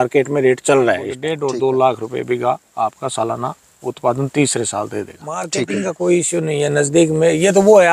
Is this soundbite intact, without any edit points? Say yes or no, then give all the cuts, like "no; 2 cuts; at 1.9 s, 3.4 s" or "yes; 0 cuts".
no; 2 cuts; at 1.2 s, 5.4 s